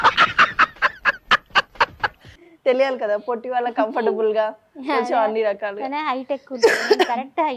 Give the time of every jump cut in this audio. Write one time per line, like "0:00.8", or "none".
none